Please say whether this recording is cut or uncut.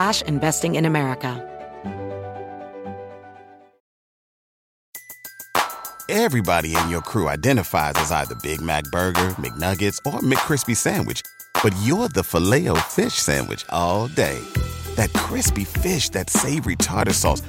cut